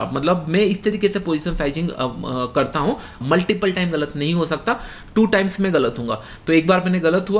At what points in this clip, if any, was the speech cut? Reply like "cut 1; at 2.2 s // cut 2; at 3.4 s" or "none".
cut 1; at 3.1 s